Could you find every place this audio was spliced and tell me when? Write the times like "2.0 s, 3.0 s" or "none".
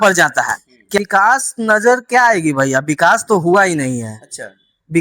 1.0 s